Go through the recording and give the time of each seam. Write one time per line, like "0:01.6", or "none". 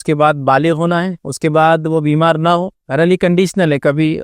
0:01.2
0:02.8

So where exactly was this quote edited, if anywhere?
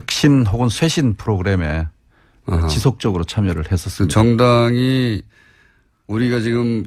none

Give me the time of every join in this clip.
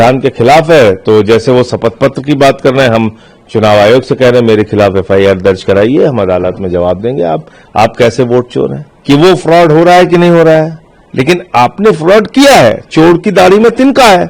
0:08.9

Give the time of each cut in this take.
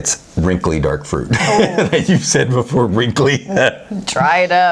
none

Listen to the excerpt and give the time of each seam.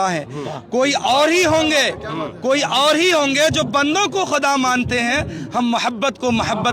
none

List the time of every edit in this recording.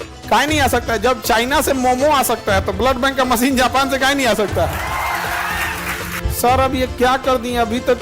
0:06.2

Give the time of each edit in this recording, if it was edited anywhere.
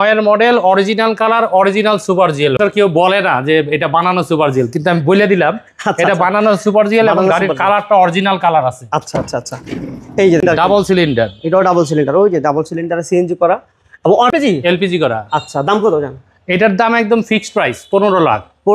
0:02.6
0:10.4
0:14.3

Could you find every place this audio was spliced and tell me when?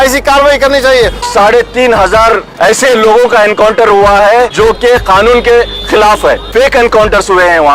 0:01.3
0:02.5
0:04.5

